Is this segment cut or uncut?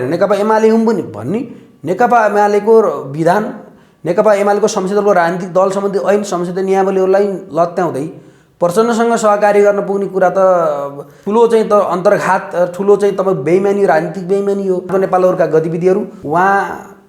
cut